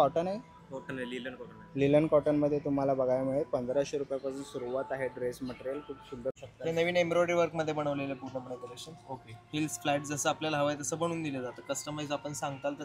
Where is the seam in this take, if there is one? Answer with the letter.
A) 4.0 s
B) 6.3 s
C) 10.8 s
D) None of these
B